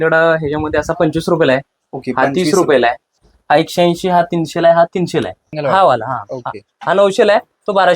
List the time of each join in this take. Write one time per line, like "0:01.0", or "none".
0:03.3
0:05.5